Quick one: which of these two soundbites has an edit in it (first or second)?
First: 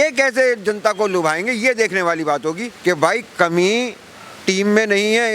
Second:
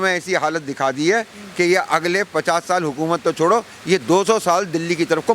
first